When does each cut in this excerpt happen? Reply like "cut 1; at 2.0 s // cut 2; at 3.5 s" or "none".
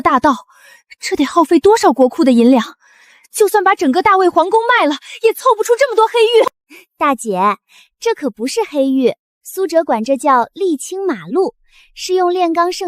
cut 1; at 6.7 s